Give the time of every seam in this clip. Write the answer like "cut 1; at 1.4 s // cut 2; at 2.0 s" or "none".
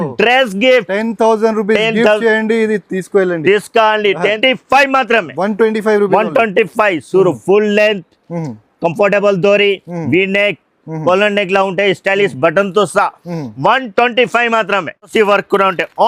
cut 1; at 4.4 s // cut 2; at 15.1 s